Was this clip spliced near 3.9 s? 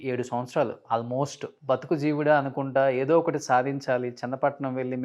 no; 1 cut; at 1.5 s

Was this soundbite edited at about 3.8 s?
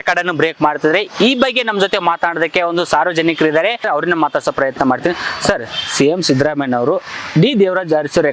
yes; 1 cut; at 3.8 s

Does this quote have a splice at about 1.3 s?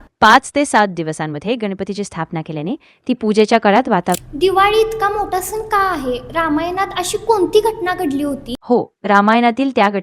no; 2 cuts; at 4.2 s, 8.5 s

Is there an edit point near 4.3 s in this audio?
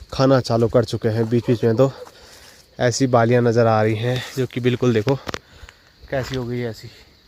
no; 0 cuts

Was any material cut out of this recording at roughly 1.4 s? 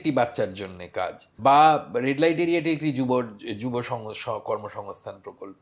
yes; 1 cut; at 1.4 s

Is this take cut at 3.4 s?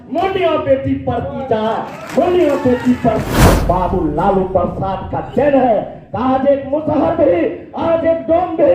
yes; 1 cut; at 3.4 s

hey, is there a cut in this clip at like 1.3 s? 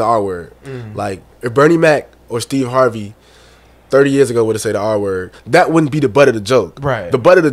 yes; 1 cut; at 1.3 s

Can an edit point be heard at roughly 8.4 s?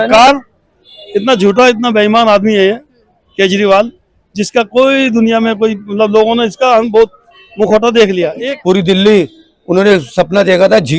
yes; 1 cut; at 8.4 s

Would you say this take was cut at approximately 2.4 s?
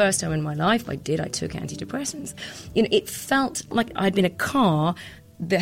yes; 1 cut; at 2.4 s

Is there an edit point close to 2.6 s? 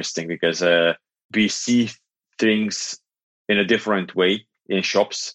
no; 1 cut; at 1.3 s

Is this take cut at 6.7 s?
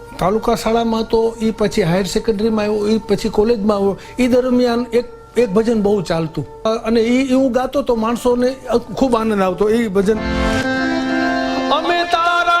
yes; 1 cut; at 6.7 s

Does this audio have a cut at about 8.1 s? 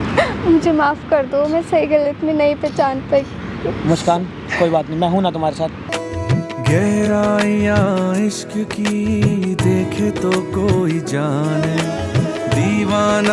no; 1 cut; at 5.9 s

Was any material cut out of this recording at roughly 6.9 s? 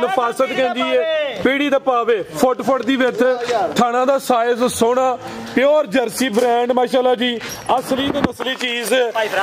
no; 0 cuts

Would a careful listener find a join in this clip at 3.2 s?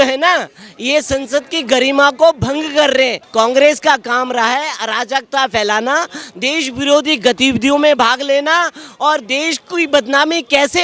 yes; 1 cut; at 3.2 s

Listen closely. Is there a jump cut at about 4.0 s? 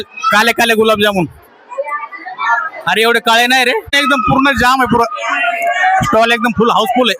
yes; 1 cut; at 4.0 s

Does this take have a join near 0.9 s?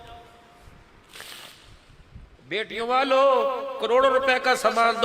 no; 1 cut; at 2.3 s

